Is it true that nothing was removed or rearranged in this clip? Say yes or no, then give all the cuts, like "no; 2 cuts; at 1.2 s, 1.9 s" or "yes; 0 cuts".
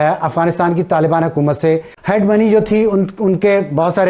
no; 1 cut; at 1.9 s